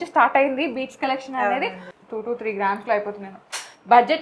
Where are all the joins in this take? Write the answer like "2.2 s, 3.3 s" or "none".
1.8 s